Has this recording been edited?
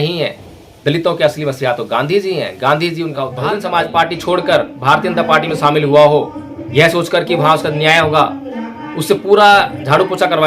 yes; 1 cut; at 3.3 s

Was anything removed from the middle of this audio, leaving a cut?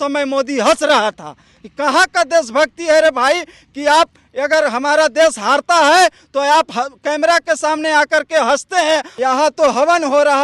yes; 1 cut; at 9.1 s

